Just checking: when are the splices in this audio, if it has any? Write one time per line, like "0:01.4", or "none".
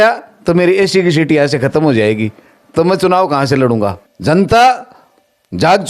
0:04.1